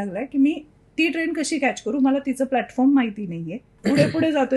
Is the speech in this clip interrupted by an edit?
yes; 1 cut; at 3.7 s

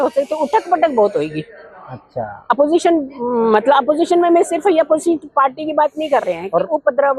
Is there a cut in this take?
no; 0 cuts

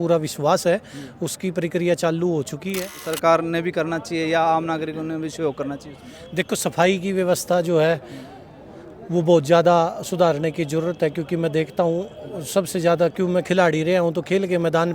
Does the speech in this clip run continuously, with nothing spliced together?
no; 1 cut; at 3.1 s

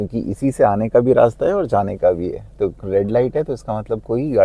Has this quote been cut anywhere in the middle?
no; 0 cuts

